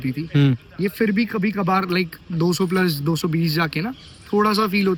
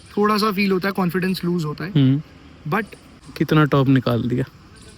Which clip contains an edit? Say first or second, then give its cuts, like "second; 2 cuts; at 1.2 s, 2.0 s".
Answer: second; 1 cut; at 3.2 s